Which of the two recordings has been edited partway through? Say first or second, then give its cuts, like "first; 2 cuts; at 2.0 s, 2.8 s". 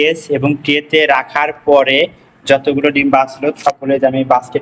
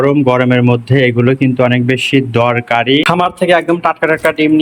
second; 1 cut; at 3.0 s